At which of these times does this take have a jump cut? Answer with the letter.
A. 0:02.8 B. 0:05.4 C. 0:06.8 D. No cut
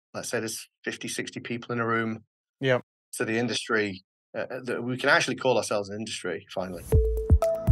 C